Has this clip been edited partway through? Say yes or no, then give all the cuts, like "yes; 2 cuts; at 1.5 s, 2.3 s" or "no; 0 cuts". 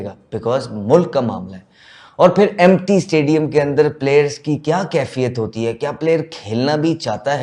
no; 0 cuts